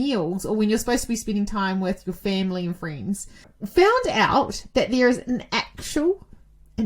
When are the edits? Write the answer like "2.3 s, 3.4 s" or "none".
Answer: 3.5 s